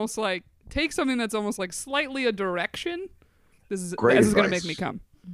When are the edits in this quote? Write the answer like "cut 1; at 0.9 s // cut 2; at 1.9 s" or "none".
cut 1; at 3.6 s